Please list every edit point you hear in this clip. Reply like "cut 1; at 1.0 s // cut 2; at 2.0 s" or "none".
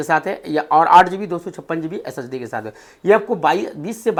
none